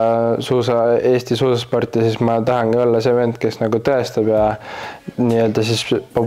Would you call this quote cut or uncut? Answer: uncut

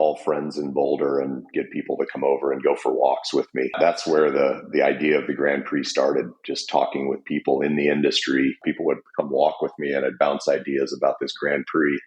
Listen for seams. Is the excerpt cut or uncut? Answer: cut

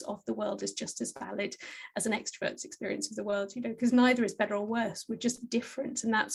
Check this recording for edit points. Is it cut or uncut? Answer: uncut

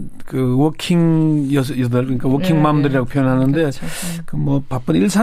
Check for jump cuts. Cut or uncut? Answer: cut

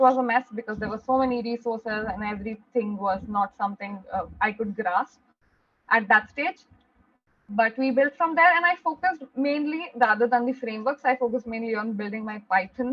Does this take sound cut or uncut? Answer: uncut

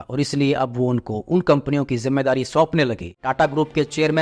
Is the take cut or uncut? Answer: cut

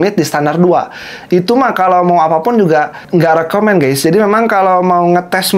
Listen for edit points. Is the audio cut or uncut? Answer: cut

